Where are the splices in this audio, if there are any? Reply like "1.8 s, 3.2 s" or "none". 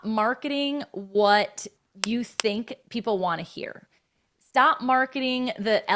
none